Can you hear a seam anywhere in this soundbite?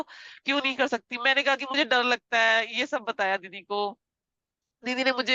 no; 0 cuts

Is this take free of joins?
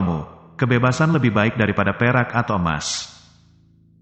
yes; 0 cuts

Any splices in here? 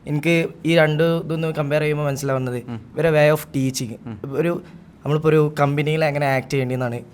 no; 0 cuts

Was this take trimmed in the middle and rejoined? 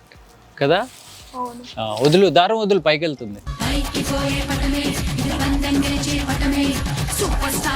no; 0 cuts

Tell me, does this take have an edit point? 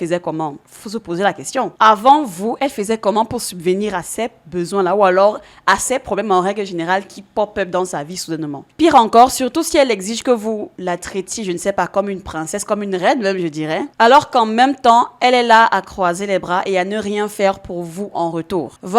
no; 0 cuts

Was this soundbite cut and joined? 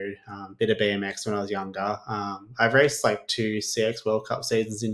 no; 0 cuts

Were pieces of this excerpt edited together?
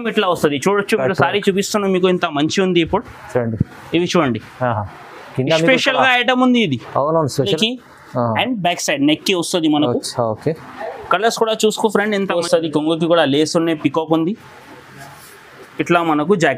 yes; 2 cuts; at 7.5 s, 12.4 s

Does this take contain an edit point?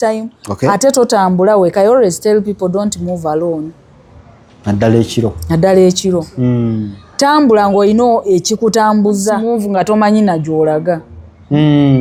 no; 0 cuts

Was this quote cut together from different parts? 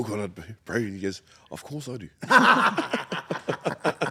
no; 0 cuts

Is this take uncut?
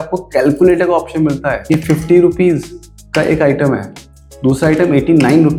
yes; 0 cuts

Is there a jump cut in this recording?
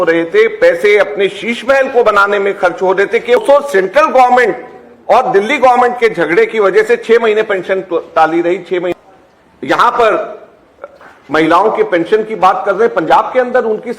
yes; 2 cuts; at 3.4 s, 8.9 s

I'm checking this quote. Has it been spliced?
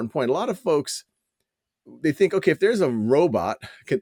no; 0 cuts

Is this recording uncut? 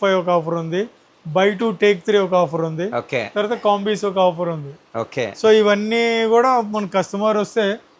yes; 0 cuts

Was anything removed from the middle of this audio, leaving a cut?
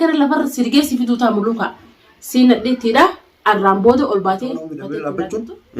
yes; 1 cut; at 4.8 s

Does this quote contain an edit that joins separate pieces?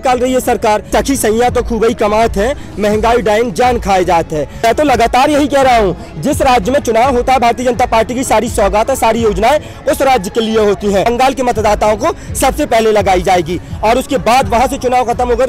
yes; 3 cuts; at 0.9 s, 4.6 s, 11.1 s

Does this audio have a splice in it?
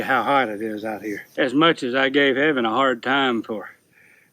yes; 1 cut; at 1.2 s

